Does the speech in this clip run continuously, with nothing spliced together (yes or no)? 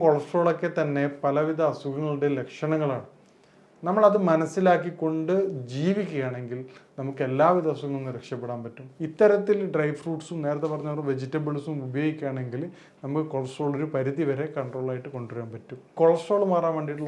no